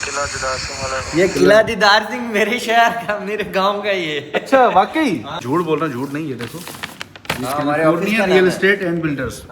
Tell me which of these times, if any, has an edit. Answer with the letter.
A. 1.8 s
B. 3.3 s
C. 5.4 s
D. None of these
C